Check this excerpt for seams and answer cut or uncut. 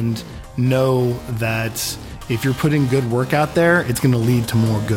uncut